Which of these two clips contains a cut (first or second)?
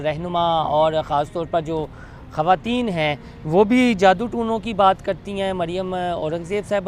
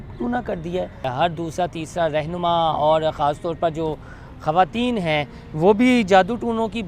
second